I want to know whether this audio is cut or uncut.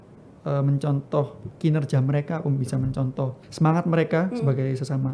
cut